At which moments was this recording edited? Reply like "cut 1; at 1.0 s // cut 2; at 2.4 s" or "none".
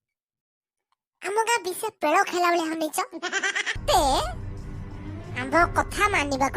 cut 1; at 3.8 s